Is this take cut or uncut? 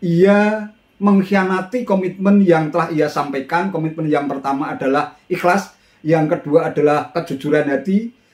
uncut